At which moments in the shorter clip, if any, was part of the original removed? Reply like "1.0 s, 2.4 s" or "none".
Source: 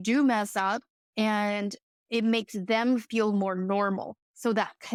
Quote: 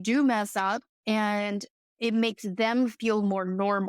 0.9 s